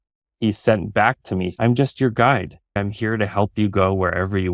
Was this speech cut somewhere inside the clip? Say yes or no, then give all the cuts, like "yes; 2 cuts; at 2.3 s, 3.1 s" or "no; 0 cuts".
yes; 2 cuts; at 1.5 s, 2.7 s